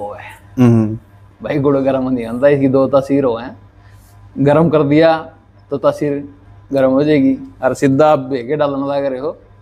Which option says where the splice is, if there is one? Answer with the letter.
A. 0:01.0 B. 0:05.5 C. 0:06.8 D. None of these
D